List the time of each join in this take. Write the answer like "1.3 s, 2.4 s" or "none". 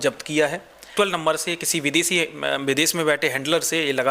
0.9 s